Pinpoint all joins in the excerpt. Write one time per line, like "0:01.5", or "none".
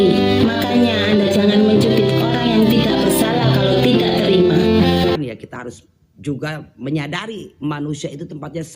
0:05.1